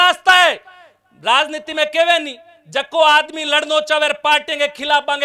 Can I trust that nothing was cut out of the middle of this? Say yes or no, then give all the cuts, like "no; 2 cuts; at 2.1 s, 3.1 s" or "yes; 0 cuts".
yes; 0 cuts